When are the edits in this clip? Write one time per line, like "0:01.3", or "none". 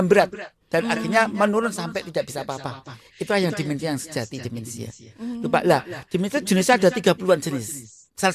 none